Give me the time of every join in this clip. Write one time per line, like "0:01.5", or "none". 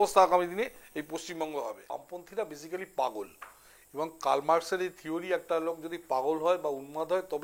0:01.9